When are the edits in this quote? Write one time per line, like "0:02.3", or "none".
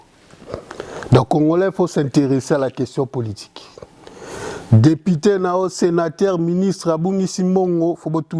none